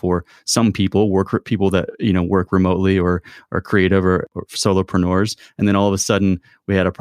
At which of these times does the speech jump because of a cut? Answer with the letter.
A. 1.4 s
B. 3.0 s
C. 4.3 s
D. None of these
C